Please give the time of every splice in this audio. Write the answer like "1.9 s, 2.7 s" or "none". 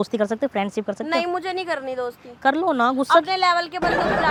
none